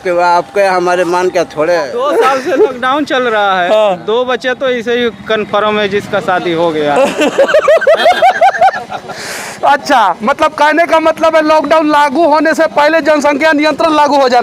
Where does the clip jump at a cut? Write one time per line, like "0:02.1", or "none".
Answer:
0:01.9